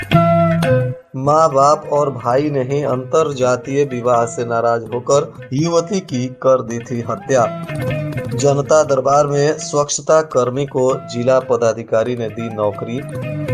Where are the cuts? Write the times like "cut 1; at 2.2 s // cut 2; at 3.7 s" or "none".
cut 1; at 1.0 s